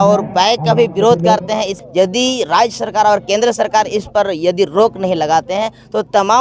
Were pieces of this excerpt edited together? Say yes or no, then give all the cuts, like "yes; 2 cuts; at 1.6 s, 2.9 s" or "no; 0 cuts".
yes; 1 cut; at 1.8 s